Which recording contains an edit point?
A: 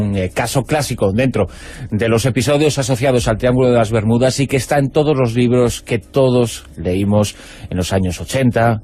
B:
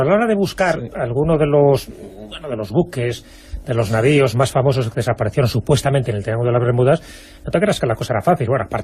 B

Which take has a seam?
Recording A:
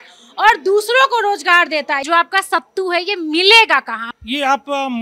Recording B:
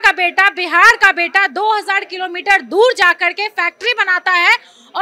A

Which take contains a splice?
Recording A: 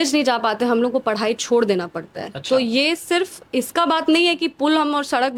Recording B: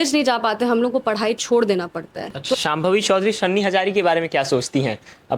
B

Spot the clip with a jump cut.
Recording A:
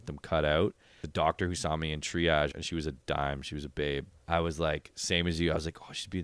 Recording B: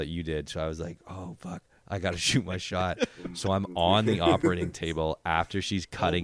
A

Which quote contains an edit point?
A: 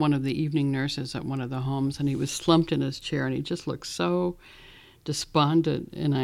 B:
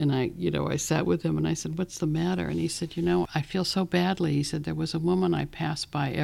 B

